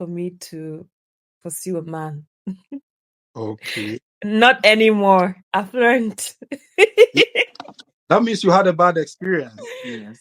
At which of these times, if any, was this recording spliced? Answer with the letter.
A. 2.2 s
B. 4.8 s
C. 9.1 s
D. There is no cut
D